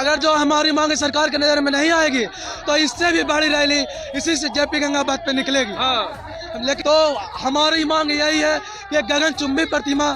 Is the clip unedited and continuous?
no; 1 cut; at 6.8 s

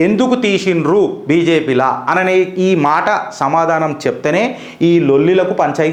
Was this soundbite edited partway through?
no; 0 cuts

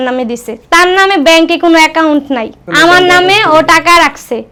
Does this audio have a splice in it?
no; 0 cuts

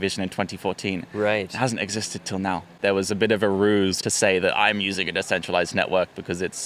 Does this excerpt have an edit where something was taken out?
yes; 2 cuts; at 2.7 s, 4.0 s

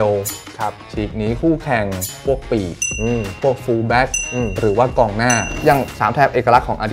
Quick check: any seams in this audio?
yes; 1 cut; at 5.5 s

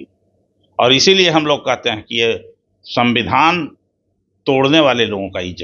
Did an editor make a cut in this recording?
no; 0 cuts

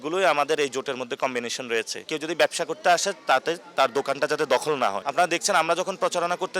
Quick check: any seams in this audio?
yes; 2 cuts; at 2.0 s, 5.0 s

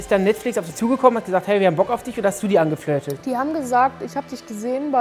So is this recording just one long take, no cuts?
yes; 0 cuts

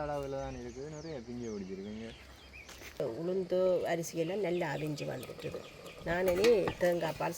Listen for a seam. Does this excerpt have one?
yes; 1 cut; at 3.0 s

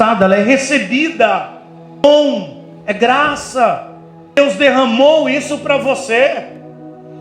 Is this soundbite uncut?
no; 2 cuts; at 2.0 s, 4.4 s

